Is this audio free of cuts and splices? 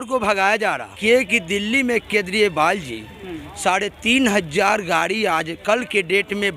no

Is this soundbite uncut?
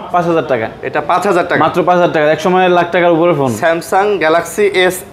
yes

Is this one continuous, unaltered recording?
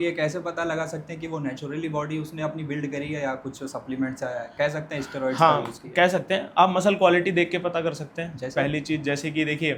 yes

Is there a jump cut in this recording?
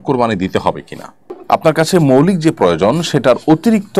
no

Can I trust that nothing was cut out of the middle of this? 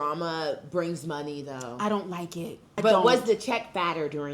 no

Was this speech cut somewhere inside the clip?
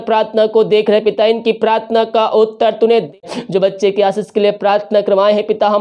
yes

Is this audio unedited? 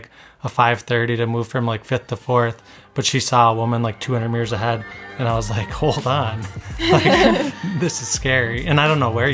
yes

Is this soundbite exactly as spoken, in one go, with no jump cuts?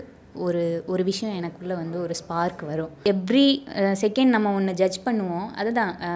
no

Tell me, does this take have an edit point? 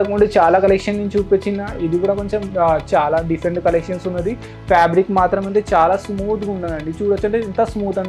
no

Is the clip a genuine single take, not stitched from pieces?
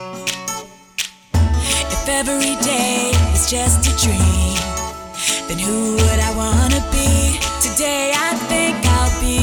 yes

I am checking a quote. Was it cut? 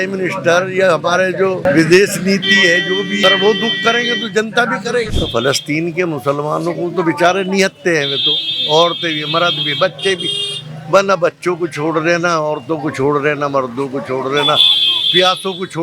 yes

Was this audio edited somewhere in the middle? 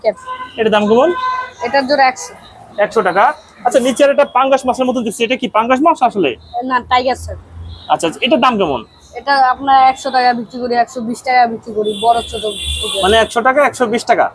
no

